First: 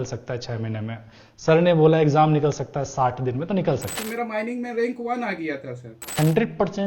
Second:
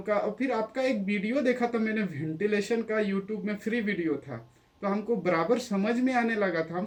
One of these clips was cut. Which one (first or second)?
first